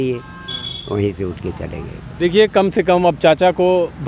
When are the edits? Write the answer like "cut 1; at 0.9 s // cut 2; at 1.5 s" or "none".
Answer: none